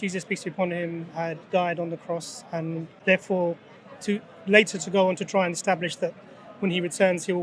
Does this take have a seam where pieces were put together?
yes; 1 cut; at 2.9 s

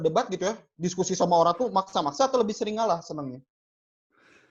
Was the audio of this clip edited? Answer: no; 0 cuts

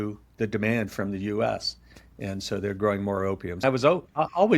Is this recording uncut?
no; 1 cut; at 3.6 s

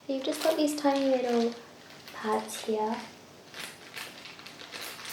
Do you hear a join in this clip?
no; 0 cuts

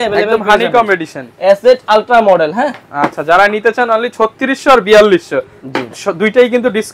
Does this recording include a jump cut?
no; 0 cuts

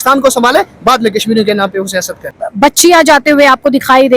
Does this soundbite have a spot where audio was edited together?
yes; 1 cut; at 2.3 s

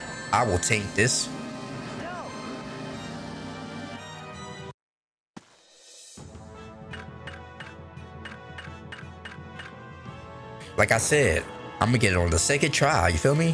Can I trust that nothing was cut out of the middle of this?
yes; 0 cuts

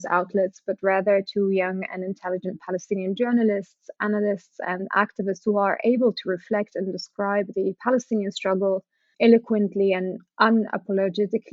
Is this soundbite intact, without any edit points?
yes; 0 cuts

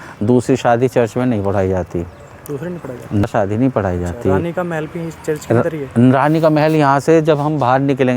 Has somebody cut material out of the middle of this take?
yes; 1 cut; at 3.2 s

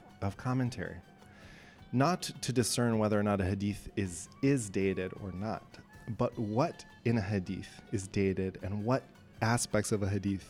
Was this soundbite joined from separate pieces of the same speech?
no; 0 cuts

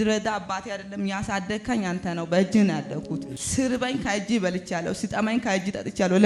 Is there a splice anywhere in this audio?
yes; 1 cut; at 3.4 s

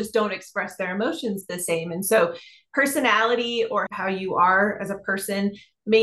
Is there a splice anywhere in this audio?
yes; 1 cut; at 3.9 s

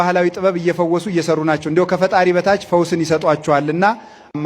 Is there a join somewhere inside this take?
no; 0 cuts

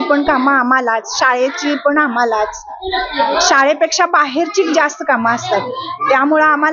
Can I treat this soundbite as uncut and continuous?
yes; 0 cuts

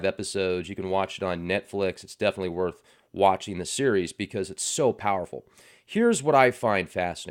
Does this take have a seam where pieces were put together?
yes; 1 cut; at 2.2 s

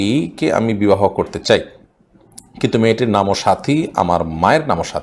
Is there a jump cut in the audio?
no; 0 cuts

